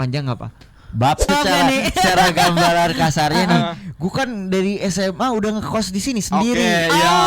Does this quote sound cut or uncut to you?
cut